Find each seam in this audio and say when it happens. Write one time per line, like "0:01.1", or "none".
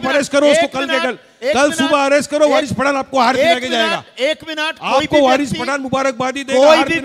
none